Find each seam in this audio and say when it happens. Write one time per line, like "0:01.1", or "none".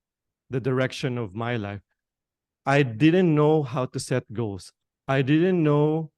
0:01.9
0:04.6